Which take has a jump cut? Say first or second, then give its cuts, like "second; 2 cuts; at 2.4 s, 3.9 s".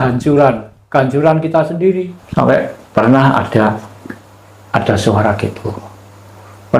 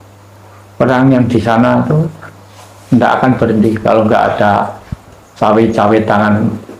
first; 1 cut; at 2.2 s